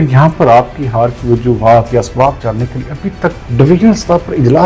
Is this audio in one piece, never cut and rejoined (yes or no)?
no